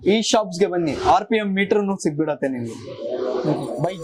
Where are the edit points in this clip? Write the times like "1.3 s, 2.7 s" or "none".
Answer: none